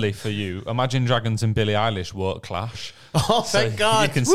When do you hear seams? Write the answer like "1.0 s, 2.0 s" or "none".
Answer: none